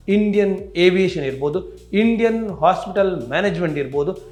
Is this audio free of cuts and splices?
yes; 0 cuts

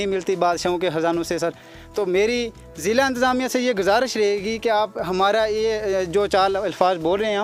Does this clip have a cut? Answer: no; 0 cuts

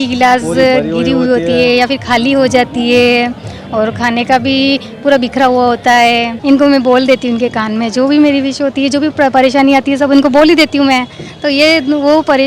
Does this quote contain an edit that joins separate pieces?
yes; 1 cut; at 6.3 s

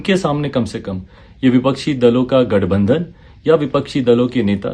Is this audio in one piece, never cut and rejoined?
yes; 0 cuts

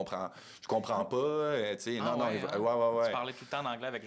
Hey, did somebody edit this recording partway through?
no; 0 cuts

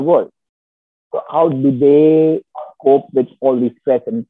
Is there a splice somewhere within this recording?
no; 0 cuts

